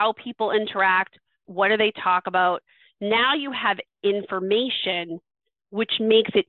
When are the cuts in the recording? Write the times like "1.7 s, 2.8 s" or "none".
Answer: 1.4 s